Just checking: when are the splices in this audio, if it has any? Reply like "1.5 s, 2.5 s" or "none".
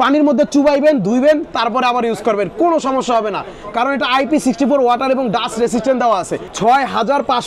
6.4 s